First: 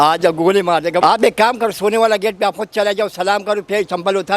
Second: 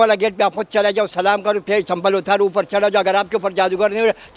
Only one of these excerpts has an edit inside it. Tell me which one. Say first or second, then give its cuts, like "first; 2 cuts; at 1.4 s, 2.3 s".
first; 1 cut; at 1.0 s